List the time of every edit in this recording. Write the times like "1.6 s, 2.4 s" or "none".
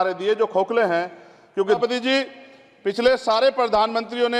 1.8 s